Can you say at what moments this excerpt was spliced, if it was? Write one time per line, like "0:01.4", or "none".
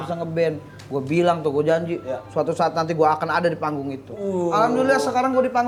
none